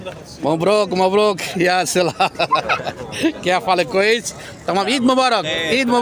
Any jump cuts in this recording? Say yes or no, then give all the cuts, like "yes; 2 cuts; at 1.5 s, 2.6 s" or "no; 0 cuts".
no; 0 cuts